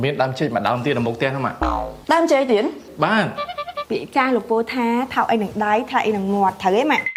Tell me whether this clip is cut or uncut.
uncut